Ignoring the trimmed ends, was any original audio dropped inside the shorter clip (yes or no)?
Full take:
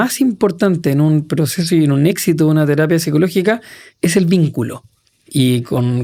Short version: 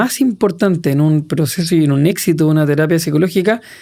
no